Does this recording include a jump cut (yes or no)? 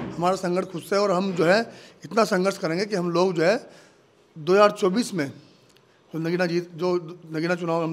no